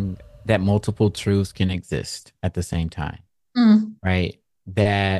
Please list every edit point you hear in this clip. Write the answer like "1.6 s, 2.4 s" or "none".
none